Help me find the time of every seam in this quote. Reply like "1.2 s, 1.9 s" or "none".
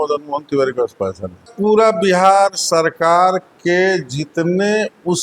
1.4 s